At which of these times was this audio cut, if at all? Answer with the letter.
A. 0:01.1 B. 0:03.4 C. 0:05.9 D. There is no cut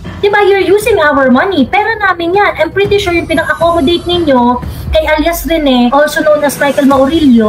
C